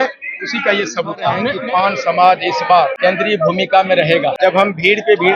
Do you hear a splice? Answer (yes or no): yes